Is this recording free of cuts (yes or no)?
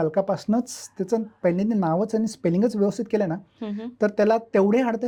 yes